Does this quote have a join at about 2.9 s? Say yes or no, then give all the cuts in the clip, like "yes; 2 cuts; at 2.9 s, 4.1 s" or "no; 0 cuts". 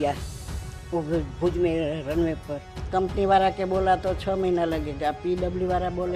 yes; 1 cut; at 2.9 s